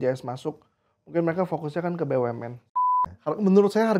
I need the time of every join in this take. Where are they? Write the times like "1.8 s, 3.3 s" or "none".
2.8 s

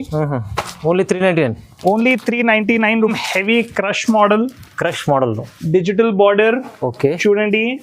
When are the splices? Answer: 3.1 s

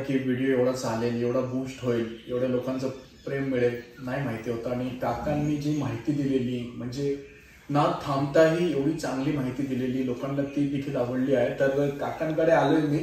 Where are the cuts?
none

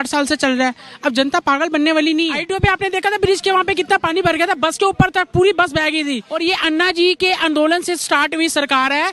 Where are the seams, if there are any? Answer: 2.4 s, 6.3 s

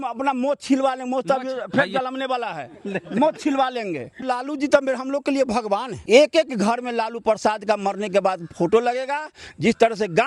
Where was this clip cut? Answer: 4.2 s, 5.9 s

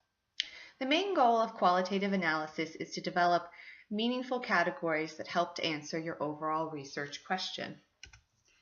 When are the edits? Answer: 4.5 s

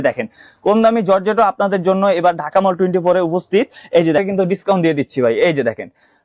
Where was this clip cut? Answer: 4.2 s

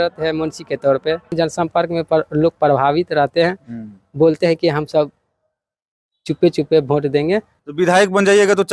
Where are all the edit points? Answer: 1.3 s, 7.5 s

